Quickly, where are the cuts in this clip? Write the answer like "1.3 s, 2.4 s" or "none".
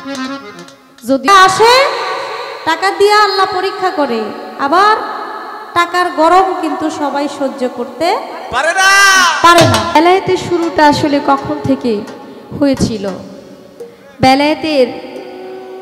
1.3 s, 10.0 s